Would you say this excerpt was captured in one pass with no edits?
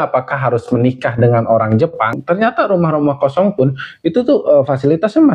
no; 1 cut; at 2.2 s

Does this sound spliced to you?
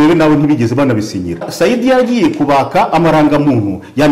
yes; 1 cut; at 1.5 s

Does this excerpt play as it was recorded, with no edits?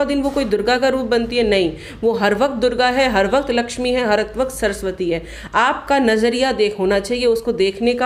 yes; 0 cuts

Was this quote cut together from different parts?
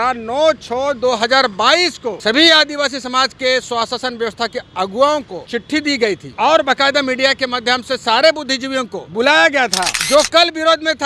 yes; 1 cut; at 10.0 s

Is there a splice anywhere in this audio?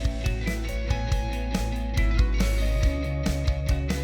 no; 0 cuts

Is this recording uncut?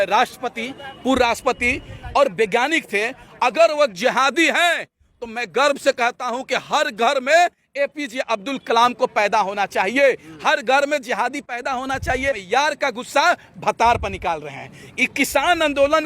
no; 1 cut; at 12.4 s

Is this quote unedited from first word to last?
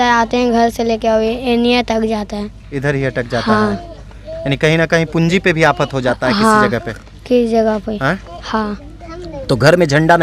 yes; 0 cuts

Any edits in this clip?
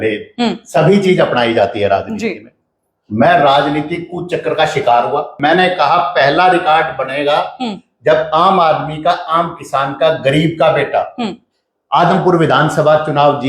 yes; 1 cut; at 5.3 s

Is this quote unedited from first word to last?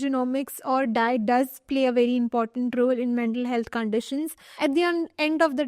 no; 1 cut; at 4.4 s

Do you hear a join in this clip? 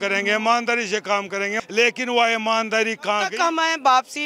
yes; 2 cuts; at 1.6 s, 3.3 s

